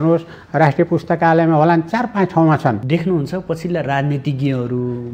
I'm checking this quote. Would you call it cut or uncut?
cut